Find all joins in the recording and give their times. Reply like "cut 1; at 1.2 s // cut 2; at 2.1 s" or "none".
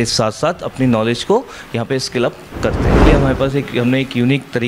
cut 1; at 3.1 s